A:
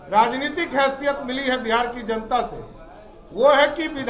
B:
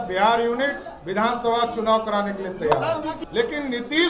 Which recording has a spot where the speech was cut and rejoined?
B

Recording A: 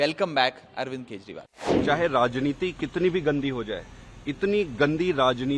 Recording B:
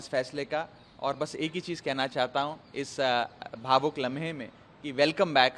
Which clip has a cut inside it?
A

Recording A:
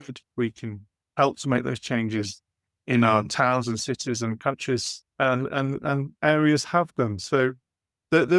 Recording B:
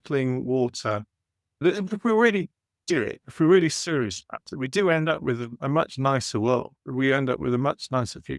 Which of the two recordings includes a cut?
B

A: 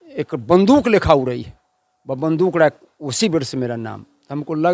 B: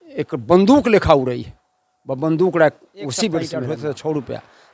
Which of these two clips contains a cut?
B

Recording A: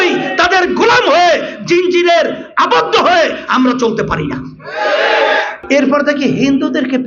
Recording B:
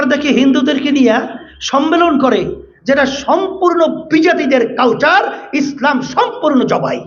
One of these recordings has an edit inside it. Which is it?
A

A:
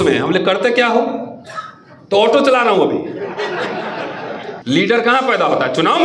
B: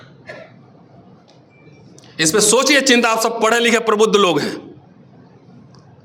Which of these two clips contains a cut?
A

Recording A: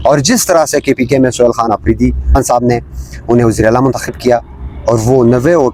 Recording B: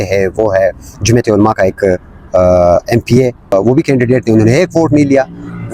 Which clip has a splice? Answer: B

